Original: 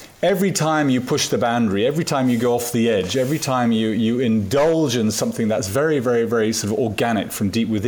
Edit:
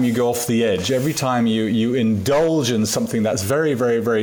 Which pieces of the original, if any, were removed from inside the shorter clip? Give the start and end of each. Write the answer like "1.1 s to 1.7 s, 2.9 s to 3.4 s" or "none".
none